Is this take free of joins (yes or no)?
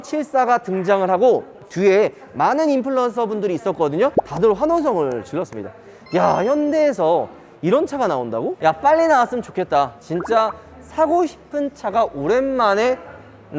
no